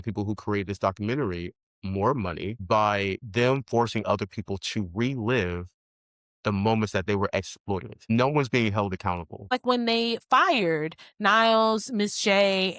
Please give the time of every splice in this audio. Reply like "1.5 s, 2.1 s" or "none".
2.8 s, 8.1 s, 9.5 s